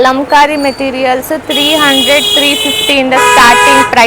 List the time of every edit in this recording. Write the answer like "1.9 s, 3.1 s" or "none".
none